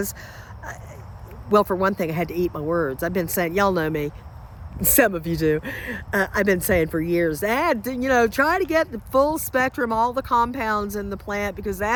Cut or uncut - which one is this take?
uncut